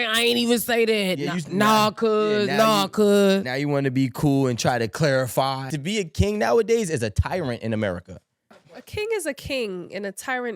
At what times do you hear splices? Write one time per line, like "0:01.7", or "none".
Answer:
0:05.7